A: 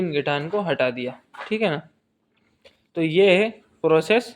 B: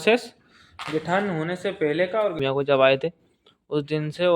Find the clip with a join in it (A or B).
B